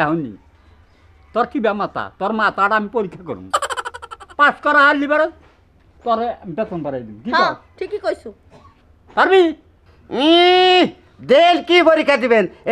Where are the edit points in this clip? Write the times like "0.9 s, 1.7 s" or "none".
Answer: none